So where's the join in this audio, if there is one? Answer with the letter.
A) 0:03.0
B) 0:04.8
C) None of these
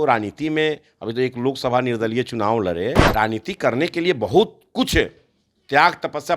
A